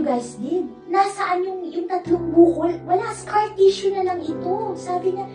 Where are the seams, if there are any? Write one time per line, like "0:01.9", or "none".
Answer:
none